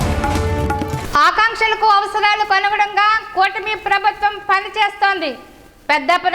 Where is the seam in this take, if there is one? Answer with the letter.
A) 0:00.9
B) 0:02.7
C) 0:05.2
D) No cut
A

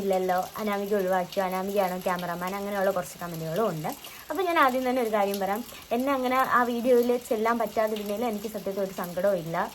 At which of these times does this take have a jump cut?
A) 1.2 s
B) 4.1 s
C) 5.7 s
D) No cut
D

